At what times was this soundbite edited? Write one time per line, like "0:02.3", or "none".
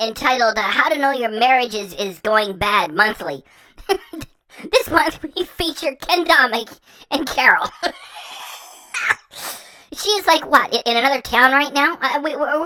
none